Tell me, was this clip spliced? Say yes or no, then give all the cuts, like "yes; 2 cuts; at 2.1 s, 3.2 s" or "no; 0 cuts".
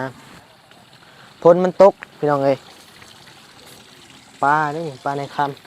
no; 0 cuts